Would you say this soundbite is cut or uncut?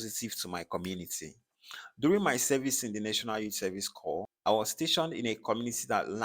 cut